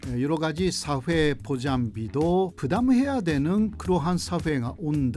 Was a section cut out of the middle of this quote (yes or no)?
no